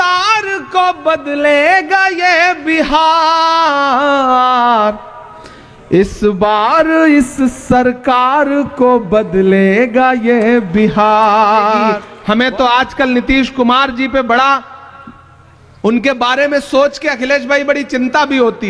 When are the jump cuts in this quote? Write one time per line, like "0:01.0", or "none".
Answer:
0:12.1